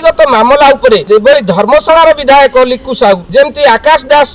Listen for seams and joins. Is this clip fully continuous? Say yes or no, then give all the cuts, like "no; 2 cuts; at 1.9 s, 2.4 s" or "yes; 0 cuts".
no; 2 cuts; at 1.0 s, 3.2 s